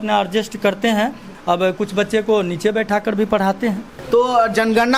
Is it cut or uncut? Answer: cut